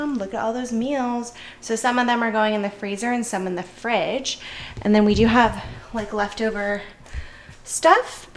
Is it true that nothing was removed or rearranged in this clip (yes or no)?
yes